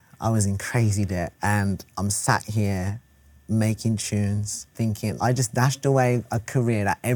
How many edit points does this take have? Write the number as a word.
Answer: two